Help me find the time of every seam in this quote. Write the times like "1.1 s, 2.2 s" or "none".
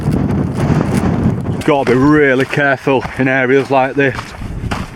1.5 s

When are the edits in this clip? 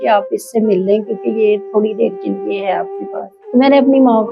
3.4 s

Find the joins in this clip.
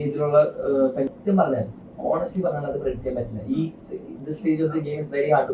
1.1 s

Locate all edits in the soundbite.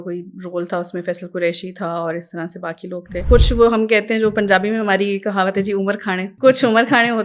3.2 s, 6.3 s

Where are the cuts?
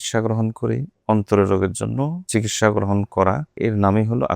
2.2 s, 3.5 s

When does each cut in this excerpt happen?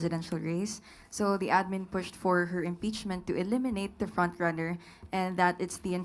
none

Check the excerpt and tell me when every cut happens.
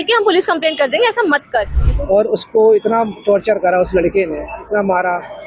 1.8 s

